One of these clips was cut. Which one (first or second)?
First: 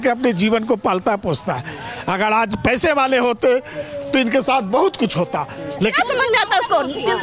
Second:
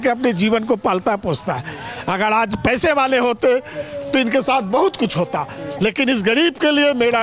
first